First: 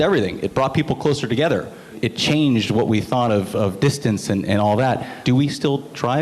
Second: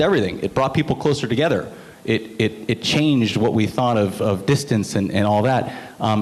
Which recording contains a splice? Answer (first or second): first